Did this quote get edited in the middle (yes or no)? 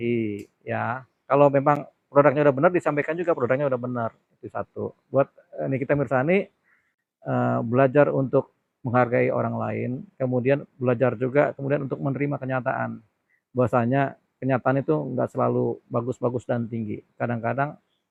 no